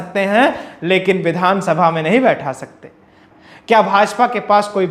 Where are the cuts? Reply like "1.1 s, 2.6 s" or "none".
3.2 s